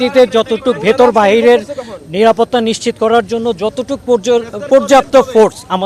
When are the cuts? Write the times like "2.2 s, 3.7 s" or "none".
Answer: none

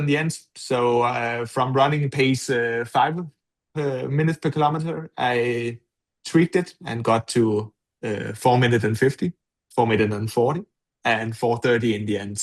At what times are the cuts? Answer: none

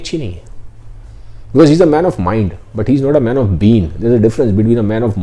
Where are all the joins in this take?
none

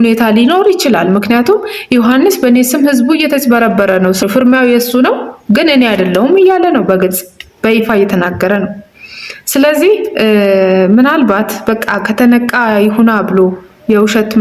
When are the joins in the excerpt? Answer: 4.2 s

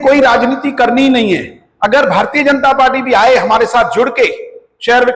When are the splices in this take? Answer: none

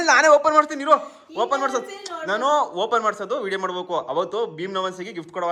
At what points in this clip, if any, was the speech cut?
none

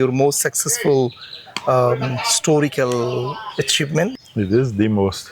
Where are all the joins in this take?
4.2 s

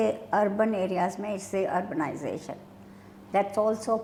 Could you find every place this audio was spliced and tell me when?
none

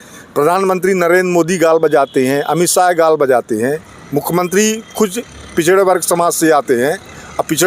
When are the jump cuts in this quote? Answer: none

